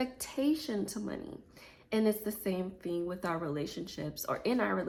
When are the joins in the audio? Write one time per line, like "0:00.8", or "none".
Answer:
none